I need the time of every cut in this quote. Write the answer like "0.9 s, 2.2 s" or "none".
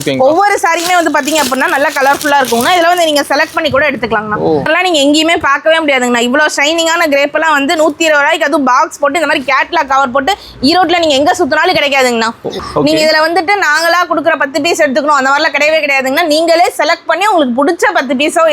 4.7 s, 12.6 s

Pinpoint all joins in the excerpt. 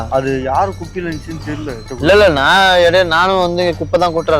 1.9 s

